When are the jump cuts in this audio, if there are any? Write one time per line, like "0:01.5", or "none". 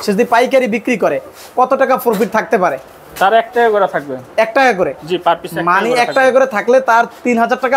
none